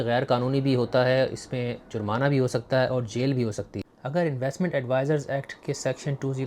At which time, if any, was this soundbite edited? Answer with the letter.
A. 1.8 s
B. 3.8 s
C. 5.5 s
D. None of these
B